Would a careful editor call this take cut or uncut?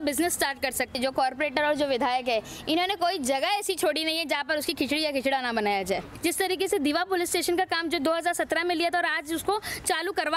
cut